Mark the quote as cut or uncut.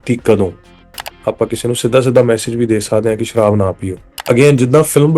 cut